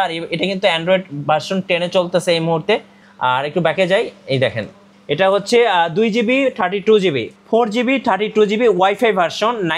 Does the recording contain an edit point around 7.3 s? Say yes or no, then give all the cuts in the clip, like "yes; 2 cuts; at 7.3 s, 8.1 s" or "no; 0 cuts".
yes; 1 cut; at 7.3 s